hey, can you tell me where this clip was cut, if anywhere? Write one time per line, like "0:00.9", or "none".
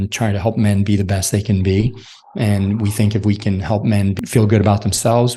0:04.2